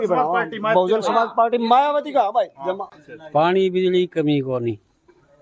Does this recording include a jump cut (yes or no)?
yes